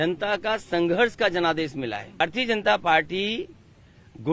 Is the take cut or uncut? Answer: cut